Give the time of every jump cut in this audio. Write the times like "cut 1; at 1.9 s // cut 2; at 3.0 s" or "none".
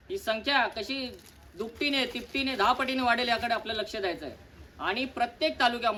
none